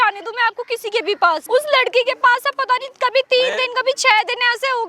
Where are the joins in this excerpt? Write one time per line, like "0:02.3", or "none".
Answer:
0:01.4